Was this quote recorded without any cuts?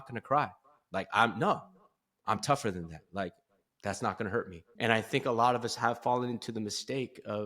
no; 1 cut; at 4.6 s

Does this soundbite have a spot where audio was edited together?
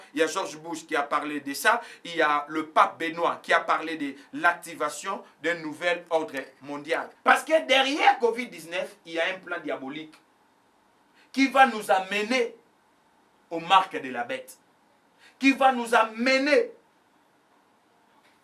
yes; 1 cut; at 7.1 s

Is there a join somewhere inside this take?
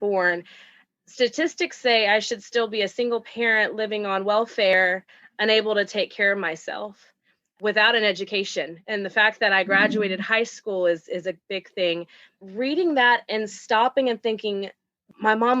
yes; 1 cut; at 12.3 s

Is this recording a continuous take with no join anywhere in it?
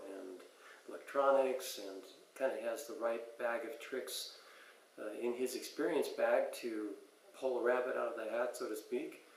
yes; 0 cuts

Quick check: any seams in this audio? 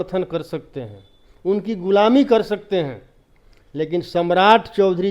no; 0 cuts

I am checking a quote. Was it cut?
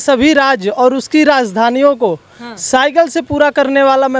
no; 0 cuts

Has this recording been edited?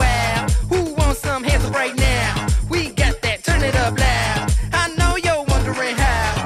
no; 0 cuts

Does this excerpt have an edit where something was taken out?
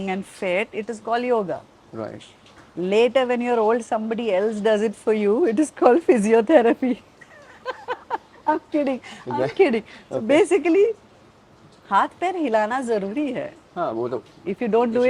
no; 0 cuts

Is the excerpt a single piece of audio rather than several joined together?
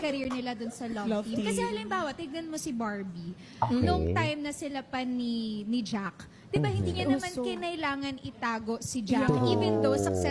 yes; 0 cuts

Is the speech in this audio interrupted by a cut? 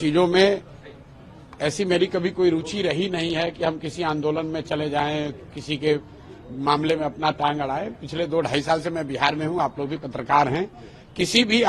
no; 0 cuts

